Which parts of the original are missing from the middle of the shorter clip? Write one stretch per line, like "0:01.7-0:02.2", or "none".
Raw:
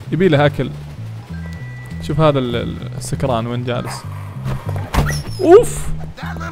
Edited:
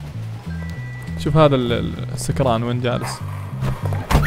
none